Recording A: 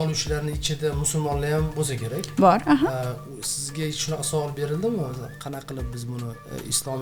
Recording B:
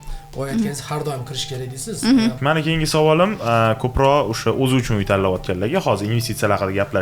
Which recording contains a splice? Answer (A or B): B